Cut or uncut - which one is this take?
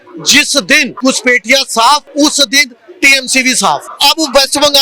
cut